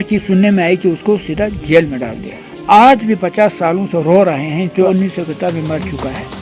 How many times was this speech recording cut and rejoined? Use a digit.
2